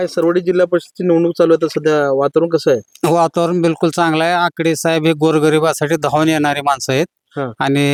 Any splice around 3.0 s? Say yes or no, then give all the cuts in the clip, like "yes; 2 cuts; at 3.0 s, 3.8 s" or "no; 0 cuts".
no; 0 cuts